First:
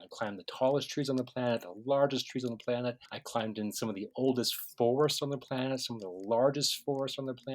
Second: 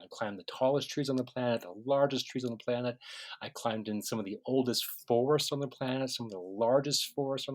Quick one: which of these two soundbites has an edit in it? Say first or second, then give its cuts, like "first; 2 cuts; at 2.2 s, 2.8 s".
first; 1 cut; at 3.1 s